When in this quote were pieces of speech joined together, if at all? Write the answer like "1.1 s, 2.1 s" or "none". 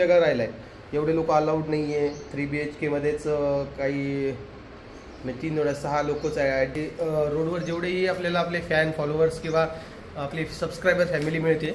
6.7 s